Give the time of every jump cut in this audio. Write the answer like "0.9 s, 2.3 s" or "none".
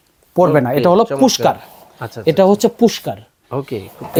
none